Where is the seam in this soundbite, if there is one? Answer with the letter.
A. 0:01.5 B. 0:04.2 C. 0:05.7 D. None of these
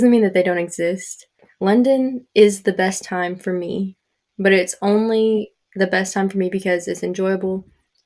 A